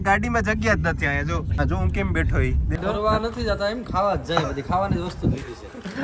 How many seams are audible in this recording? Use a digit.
2